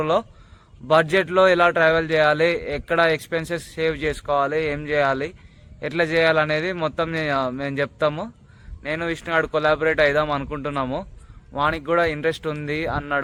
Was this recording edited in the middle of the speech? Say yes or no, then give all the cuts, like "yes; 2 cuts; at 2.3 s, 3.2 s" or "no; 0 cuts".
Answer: no; 0 cuts